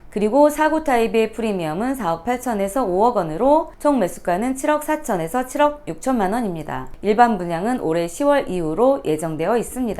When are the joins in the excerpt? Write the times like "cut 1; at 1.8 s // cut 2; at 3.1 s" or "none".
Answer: cut 1; at 7.0 s